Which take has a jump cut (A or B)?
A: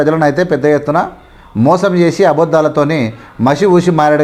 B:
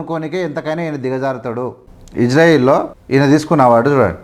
B